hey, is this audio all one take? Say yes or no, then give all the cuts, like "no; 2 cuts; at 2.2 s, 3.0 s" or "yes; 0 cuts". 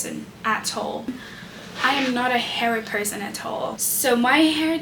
no; 1 cut; at 1.1 s